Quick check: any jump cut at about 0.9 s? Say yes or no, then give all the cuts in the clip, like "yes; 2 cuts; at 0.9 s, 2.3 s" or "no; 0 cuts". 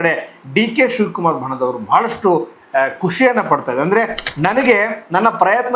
no; 1 cut; at 4.2 s